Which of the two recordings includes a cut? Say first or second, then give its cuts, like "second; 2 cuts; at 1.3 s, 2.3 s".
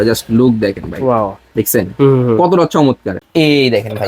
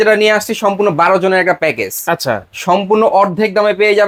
first; 1 cut; at 3.1 s